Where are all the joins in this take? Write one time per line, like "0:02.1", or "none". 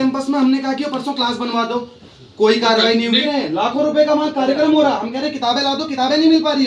0:03.2